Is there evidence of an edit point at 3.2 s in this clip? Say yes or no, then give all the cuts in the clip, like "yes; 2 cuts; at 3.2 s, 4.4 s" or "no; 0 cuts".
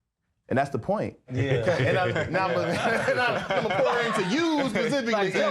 no; 1 cut; at 1.4 s